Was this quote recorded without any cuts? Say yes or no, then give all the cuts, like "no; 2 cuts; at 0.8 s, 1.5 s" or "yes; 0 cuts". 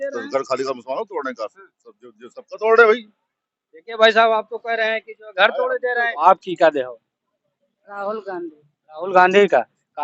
no; 1 cut; at 6.1 s